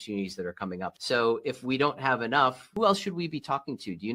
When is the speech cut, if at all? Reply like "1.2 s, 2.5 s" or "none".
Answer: 0.9 s, 2.7 s